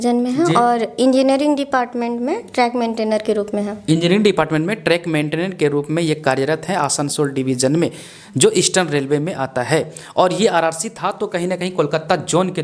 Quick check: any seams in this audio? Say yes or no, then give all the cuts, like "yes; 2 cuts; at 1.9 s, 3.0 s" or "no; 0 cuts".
no; 0 cuts